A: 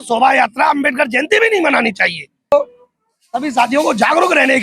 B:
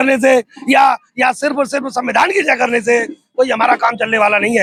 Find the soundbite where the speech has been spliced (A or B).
A